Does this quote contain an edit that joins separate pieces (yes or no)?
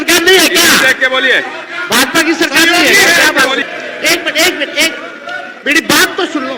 yes